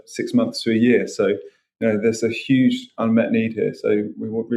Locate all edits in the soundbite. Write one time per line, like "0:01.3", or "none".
none